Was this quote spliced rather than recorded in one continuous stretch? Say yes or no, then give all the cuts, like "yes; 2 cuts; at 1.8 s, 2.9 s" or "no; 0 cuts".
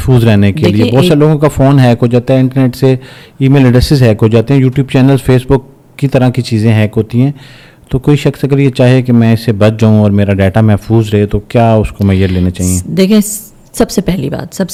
no; 0 cuts